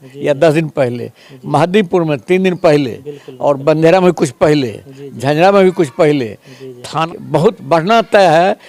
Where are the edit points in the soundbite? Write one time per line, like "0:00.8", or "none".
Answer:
0:07.0